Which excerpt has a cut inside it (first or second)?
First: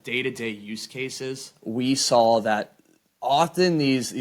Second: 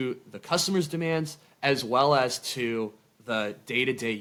first